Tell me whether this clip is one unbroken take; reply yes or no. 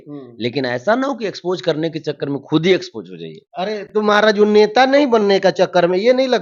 yes